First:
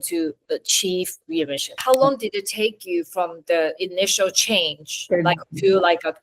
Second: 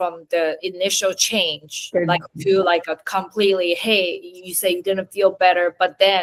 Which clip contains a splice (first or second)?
first